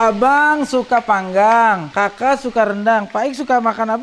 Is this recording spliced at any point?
yes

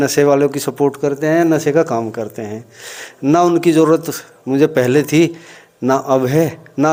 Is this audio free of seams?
yes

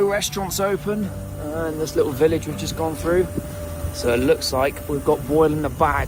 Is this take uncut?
yes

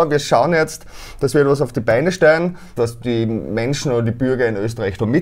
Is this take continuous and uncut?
no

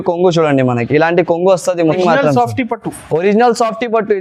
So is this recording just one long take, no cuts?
no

